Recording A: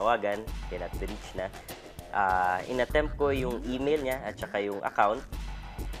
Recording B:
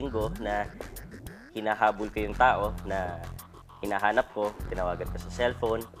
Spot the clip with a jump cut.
B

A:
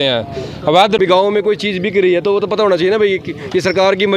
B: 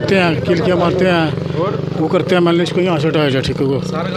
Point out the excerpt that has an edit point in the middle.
A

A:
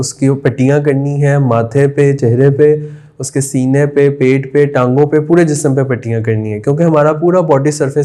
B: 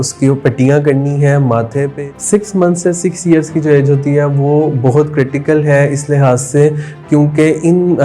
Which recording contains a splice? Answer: B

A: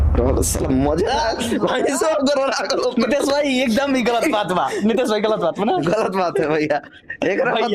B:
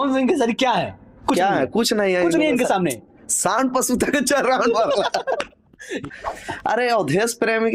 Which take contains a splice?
B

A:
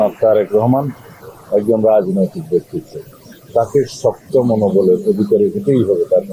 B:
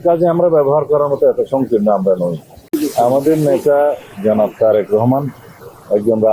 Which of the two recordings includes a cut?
B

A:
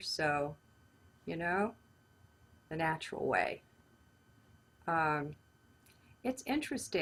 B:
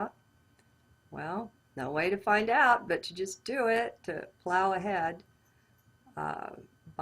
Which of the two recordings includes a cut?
B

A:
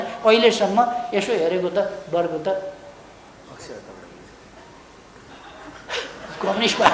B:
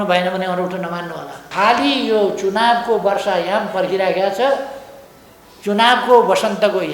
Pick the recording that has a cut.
B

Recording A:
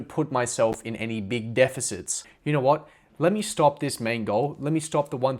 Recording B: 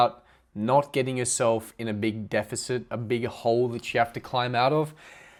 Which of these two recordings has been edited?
A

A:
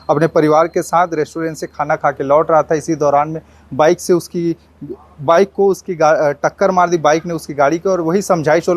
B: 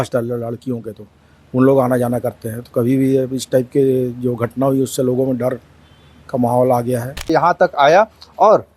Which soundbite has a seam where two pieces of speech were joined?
B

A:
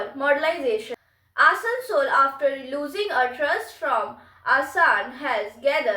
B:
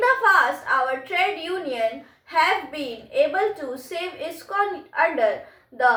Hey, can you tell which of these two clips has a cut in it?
A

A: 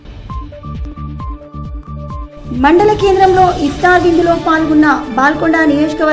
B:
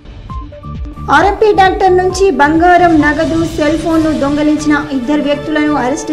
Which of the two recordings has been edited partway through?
A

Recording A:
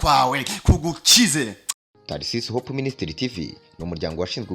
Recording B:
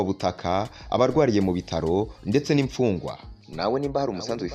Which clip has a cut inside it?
A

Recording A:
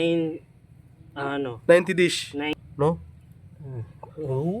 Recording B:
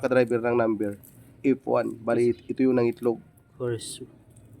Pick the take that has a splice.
A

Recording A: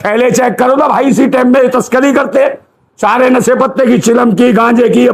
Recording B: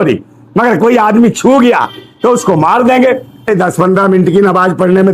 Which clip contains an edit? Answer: B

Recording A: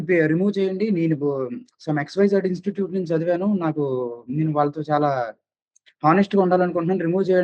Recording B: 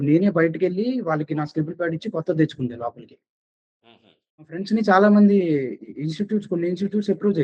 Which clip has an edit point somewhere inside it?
B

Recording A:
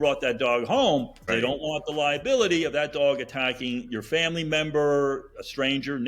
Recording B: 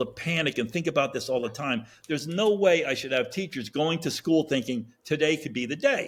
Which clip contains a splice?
A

